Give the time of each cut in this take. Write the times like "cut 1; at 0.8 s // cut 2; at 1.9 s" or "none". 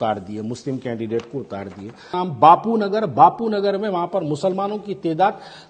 cut 1; at 2.1 s